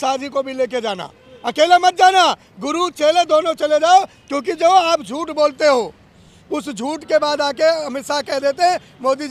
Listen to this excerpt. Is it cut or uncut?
uncut